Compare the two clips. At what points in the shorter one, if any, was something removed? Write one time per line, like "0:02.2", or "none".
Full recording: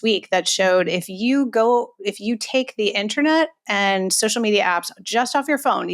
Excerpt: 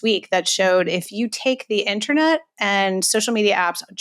0:01.1